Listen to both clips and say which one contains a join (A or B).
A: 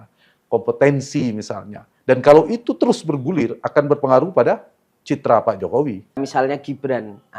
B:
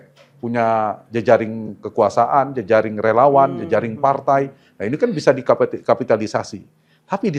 A